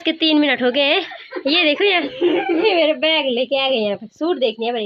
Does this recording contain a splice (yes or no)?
yes